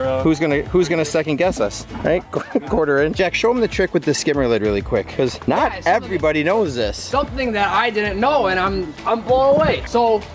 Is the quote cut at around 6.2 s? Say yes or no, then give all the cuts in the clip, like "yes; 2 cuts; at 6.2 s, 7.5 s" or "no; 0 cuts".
no; 1 cut; at 3.2 s